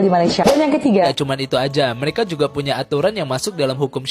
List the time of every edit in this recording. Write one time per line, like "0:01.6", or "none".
0:01.1